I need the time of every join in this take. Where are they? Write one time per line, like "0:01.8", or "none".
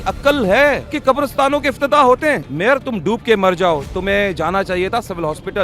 0:00.9
0:02.5